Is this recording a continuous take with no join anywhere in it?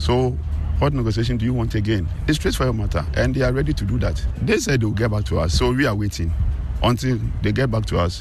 no; 2 cuts; at 2.1 s, 4.3 s

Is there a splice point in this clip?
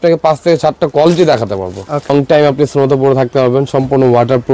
yes; 1 cut; at 2.1 s

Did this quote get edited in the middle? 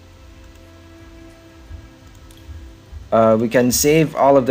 no; 0 cuts

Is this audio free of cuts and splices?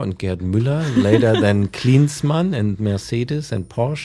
yes; 0 cuts

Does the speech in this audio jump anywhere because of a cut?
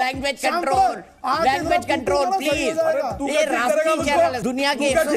no; 0 cuts

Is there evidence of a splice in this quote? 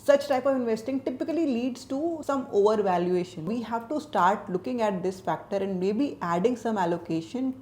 yes; 1 cut; at 3.5 s

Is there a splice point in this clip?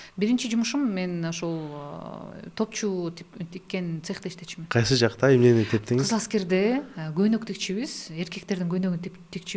no; 0 cuts

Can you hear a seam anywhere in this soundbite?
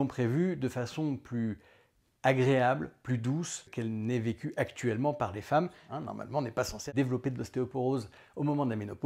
yes; 2 cuts; at 3.7 s, 5.8 s

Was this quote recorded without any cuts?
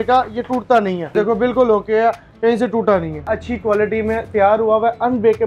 no; 2 cuts; at 1.1 s, 3.3 s

